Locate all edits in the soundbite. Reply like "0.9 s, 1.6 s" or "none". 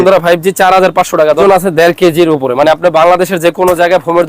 1.4 s